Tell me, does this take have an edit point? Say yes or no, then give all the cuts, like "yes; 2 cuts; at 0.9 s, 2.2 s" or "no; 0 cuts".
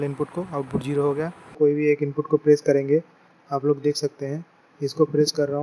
yes; 1 cut; at 1.6 s